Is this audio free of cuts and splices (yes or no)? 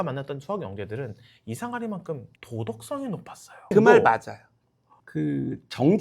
no